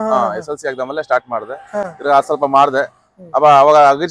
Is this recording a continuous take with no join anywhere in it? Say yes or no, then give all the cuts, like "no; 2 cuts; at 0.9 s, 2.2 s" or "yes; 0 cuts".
yes; 0 cuts